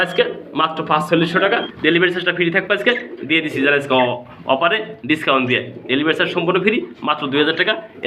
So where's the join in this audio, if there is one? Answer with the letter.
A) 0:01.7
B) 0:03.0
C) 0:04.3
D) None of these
A